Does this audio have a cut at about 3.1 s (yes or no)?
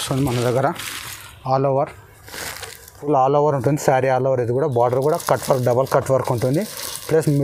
yes